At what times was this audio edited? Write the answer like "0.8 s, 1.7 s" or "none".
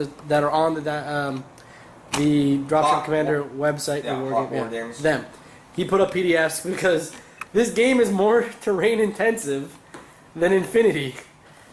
9.4 s